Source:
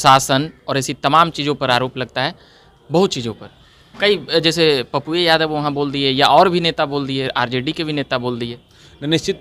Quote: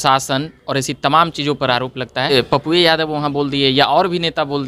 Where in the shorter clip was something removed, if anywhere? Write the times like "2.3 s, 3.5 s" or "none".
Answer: 2.3 s